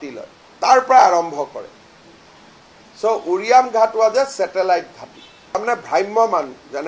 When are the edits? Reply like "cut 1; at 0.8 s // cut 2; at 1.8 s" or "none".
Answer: cut 1; at 5.5 s